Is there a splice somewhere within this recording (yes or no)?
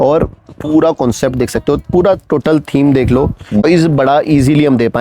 yes